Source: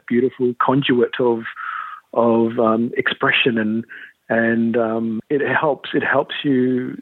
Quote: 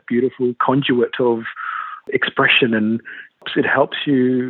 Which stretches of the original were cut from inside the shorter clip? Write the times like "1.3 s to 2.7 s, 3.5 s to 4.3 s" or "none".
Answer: 2.1 s to 2.9 s, 4.3 s to 5.8 s